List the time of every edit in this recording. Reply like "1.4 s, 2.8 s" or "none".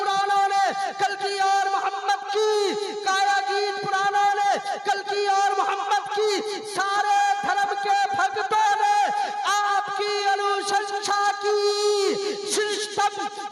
none